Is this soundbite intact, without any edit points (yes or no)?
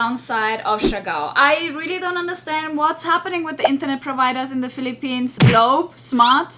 yes